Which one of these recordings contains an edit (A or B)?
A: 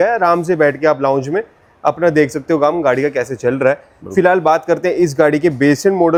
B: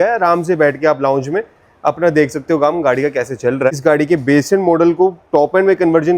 B